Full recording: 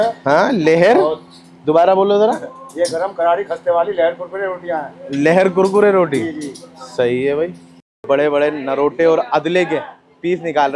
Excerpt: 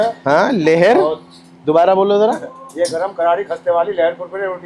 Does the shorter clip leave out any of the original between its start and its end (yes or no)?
no